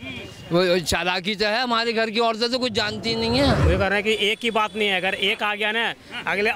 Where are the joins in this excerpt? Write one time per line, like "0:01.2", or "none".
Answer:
0:03.6